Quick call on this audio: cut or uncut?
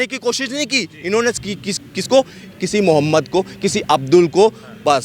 uncut